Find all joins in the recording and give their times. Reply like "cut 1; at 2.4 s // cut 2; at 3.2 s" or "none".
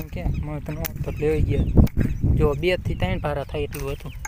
none